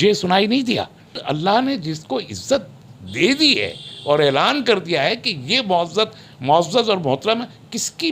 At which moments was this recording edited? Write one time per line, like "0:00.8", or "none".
0:01.2